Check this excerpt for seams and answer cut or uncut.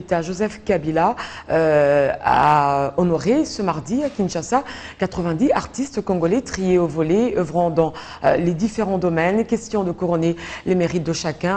uncut